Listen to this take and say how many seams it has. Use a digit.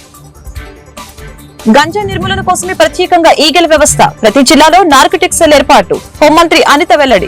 0